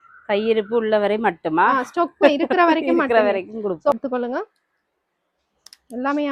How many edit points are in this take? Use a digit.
1